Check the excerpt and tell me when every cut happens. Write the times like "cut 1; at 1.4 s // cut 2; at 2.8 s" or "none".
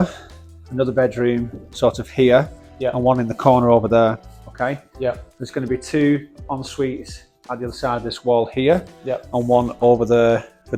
none